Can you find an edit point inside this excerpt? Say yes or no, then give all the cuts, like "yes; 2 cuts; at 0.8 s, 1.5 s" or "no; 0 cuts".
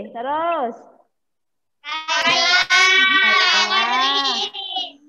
no; 0 cuts